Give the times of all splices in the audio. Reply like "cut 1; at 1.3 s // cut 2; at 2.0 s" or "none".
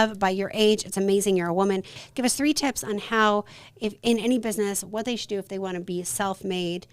cut 1; at 2.0 s